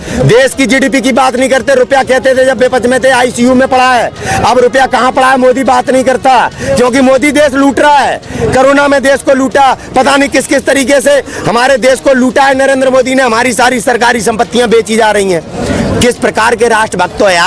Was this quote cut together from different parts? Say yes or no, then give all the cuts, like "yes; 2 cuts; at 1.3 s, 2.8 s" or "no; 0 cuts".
no; 0 cuts